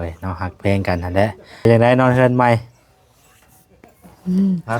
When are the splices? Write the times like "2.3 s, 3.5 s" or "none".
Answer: 1.6 s